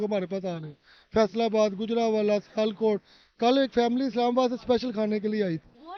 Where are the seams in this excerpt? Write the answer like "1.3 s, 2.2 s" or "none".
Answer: none

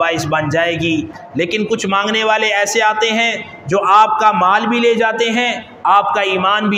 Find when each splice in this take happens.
1.2 s

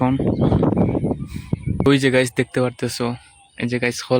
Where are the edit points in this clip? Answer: 1.9 s

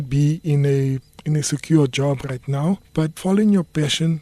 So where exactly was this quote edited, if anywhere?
none

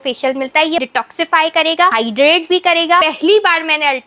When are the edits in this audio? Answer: 0.9 s, 1.9 s, 3.0 s

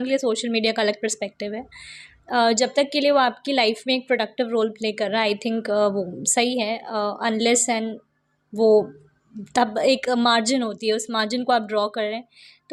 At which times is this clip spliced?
none

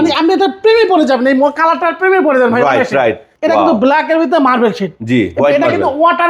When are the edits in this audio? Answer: 3.3 s

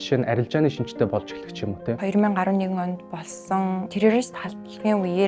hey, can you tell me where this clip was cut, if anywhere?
2.0 s

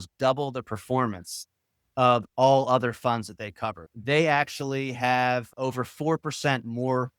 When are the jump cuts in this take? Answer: 3.8 s, 5.5 s

